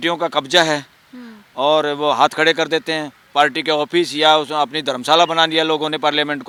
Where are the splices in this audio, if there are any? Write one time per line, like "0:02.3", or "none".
none